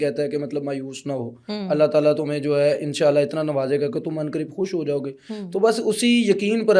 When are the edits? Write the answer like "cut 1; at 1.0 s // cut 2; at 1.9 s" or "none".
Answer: none